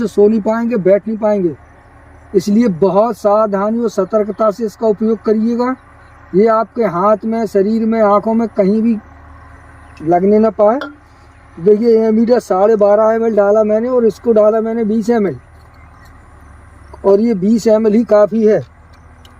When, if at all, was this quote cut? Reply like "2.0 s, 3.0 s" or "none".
none